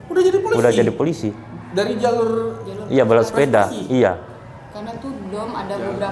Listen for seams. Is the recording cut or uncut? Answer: uncut